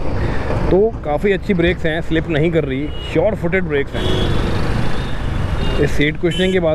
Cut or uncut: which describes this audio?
uncut